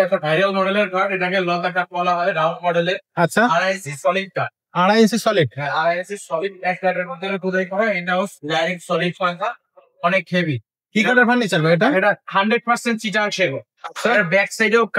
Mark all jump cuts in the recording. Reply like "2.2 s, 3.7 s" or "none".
none